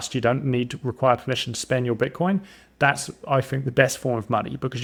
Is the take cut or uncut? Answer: uncut